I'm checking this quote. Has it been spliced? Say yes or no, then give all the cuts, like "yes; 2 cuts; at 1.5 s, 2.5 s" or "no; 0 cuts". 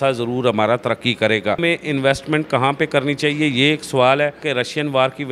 yes; 2 cuts; at 1.6 s, 4.4 s